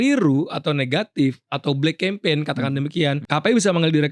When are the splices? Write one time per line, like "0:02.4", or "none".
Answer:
0:03.2